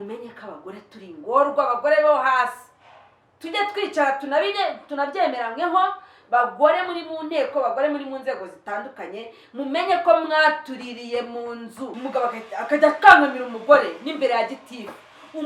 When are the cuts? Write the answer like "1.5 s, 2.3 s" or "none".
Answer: 11.9 s